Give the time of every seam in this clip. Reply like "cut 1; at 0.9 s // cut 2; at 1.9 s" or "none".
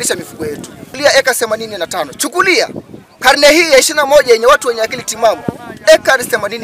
cut 1; at 1.0 s